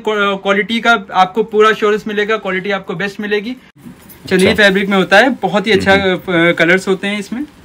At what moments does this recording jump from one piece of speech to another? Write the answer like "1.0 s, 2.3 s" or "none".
3.8 s